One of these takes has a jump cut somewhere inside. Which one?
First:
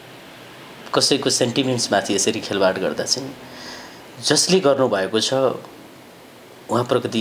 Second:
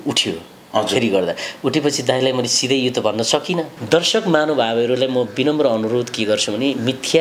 second; 1 cut; at 3.7 s

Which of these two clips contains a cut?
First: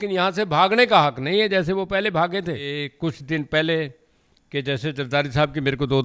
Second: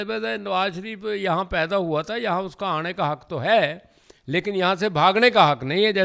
first; 1 cut; at 2.8 s

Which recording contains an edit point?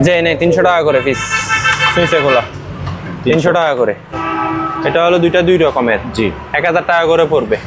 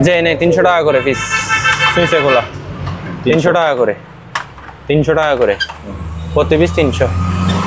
first; 1 cut; at 4.2 s

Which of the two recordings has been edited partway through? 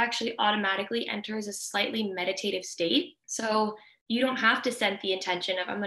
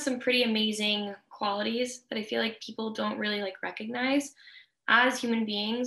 first; 2 cuts; at 3.3 s, 3.9 s

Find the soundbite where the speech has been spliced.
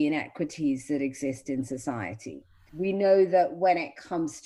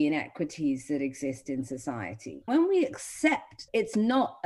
second; 2 cuts; at 2.5 s, 3.6 s

